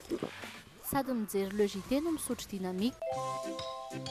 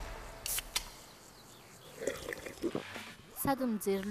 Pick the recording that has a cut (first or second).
first